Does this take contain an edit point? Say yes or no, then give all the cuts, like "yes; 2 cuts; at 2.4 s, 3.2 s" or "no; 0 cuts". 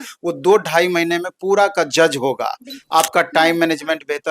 yes; 1 cut; at 2.8 s